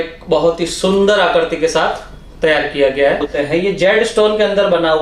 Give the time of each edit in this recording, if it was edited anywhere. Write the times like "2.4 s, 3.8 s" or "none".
3.3 s